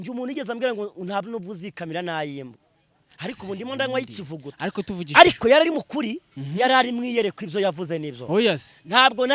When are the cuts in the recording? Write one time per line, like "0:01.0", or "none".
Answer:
none